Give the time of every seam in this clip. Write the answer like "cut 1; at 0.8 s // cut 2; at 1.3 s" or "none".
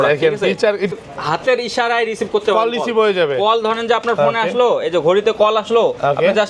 cut 1; at 0.9 s